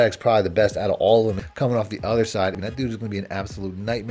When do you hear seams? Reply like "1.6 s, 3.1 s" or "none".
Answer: 1.4 s, 2.6 s